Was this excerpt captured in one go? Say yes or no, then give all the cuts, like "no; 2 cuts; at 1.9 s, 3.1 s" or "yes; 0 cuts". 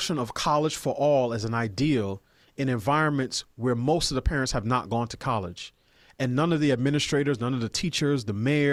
yes; 0 cuts